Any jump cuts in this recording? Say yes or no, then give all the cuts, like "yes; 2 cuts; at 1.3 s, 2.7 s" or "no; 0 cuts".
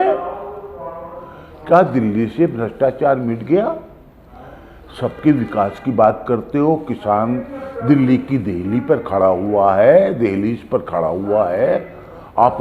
no; 0 cuts